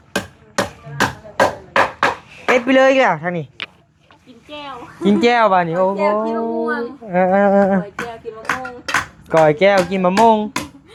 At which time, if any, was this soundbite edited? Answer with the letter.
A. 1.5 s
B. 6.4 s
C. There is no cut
C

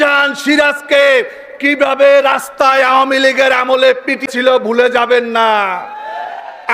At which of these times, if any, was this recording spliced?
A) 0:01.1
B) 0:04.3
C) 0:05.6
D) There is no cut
B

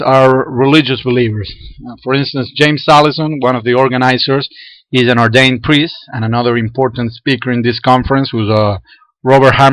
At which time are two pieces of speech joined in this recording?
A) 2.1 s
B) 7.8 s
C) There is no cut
B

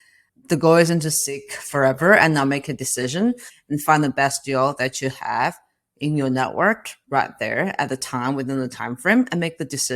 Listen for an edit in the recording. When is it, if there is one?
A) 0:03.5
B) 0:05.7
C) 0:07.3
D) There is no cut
A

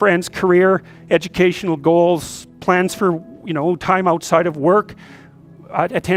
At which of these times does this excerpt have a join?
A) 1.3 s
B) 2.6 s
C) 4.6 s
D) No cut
D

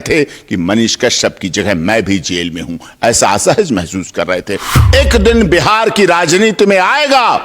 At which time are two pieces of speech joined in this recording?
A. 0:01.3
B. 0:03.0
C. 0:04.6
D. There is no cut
C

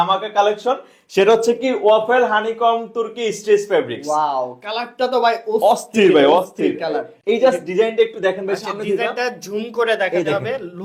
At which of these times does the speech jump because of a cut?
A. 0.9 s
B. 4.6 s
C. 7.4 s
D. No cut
D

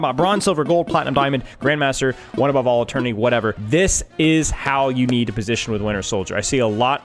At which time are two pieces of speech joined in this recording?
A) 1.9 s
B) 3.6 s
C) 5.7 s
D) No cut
B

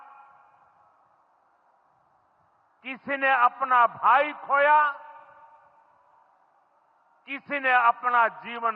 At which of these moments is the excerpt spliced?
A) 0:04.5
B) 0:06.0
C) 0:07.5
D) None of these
D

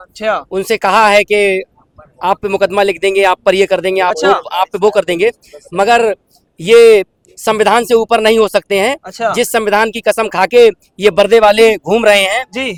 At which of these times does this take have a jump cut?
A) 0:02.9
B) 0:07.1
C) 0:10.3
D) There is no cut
D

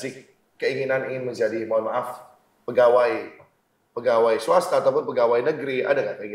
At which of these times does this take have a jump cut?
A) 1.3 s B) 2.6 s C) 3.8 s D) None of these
B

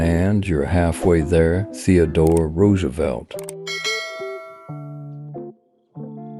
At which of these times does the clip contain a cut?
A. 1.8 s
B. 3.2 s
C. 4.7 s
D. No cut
D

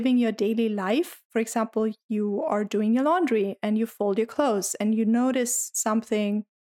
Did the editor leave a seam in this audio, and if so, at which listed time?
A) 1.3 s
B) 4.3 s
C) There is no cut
A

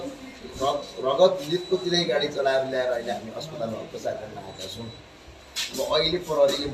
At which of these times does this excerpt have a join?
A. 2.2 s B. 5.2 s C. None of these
C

